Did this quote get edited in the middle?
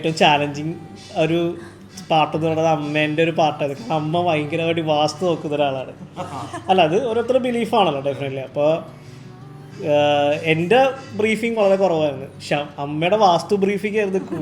no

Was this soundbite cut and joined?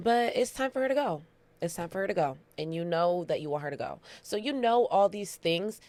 no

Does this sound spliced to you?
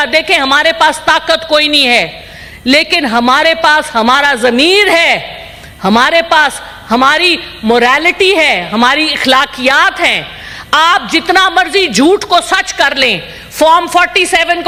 no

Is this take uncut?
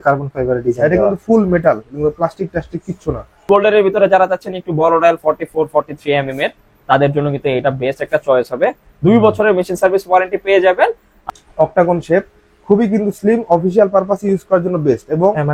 no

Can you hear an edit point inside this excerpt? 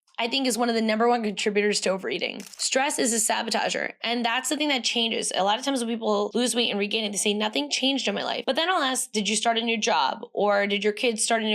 yes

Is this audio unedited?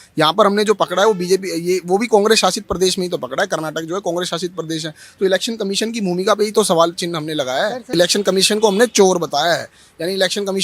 no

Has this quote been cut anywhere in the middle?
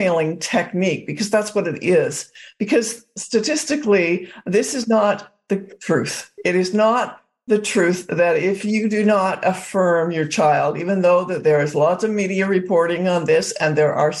no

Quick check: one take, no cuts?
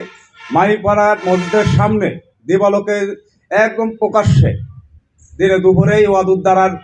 yes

